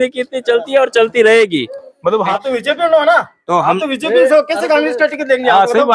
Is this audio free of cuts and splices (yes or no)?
no